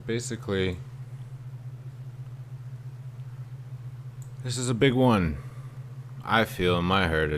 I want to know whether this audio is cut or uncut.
cut